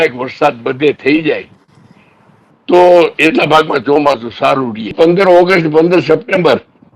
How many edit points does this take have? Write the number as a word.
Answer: one